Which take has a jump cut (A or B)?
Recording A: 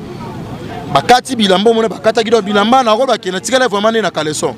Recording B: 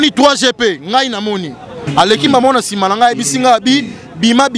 B